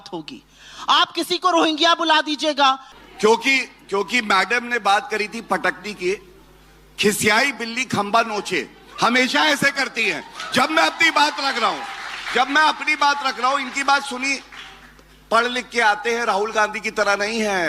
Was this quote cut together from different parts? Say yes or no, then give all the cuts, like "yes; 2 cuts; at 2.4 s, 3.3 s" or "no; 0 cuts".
yes; 1 cut; at 2.9 s